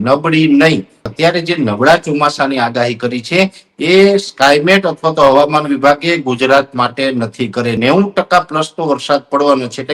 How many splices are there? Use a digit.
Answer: 2